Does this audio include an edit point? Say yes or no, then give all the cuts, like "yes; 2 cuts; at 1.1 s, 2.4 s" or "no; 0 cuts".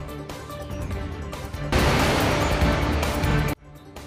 no; 0 cuts